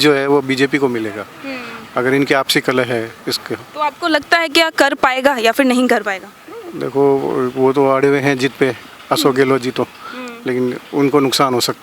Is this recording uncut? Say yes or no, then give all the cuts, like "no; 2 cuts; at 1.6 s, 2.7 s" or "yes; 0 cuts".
yes; 0 cuts